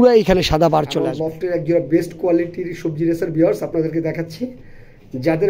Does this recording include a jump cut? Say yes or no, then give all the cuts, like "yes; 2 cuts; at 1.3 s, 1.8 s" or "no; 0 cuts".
yes; 1 cut; at 1.1 s